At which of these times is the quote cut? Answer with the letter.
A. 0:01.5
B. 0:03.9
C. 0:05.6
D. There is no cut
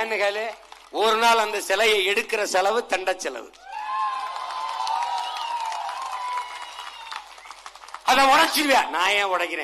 D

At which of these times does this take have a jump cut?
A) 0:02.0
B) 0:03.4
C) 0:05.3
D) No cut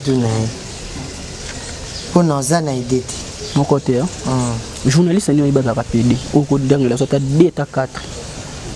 D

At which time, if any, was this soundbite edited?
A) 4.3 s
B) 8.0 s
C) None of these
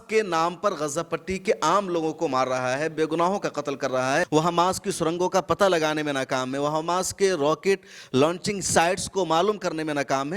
A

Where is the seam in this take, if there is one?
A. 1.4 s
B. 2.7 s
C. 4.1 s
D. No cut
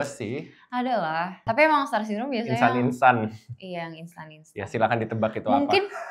A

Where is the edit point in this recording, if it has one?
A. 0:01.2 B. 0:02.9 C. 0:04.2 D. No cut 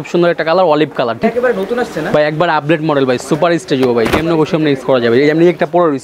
A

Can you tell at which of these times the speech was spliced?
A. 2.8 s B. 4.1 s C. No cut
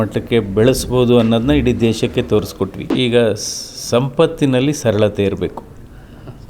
A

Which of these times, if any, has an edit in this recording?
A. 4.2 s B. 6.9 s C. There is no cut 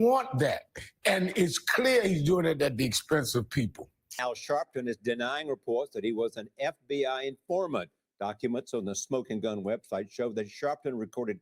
A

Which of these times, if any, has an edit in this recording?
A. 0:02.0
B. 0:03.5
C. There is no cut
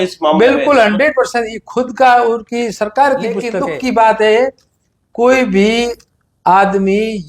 B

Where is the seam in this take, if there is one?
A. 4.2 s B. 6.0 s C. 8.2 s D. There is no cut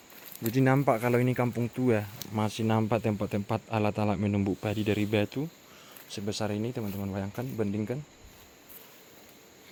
D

